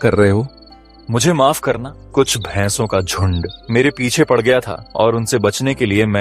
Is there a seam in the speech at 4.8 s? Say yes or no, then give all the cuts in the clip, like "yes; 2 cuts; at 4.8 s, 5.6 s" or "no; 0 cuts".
yes; 3 cuts; at 1.9 s, 3.5 s, 4.8 s